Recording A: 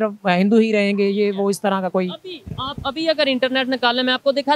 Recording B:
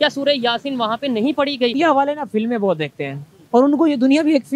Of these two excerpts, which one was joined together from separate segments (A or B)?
B